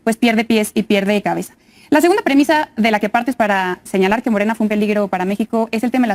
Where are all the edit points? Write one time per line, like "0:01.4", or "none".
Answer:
none